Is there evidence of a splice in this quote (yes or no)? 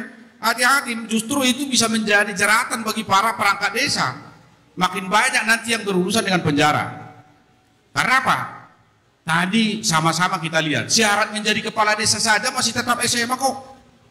no